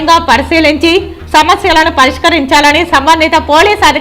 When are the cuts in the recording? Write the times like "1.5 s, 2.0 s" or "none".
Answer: none